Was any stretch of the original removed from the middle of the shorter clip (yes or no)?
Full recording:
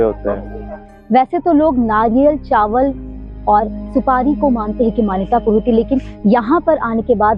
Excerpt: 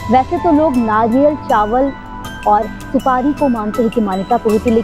no